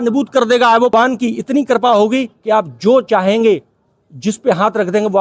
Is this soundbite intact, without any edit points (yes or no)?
no